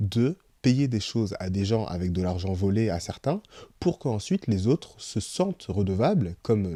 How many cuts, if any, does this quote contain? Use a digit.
0